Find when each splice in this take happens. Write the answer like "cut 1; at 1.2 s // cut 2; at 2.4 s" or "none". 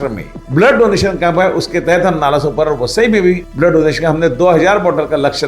none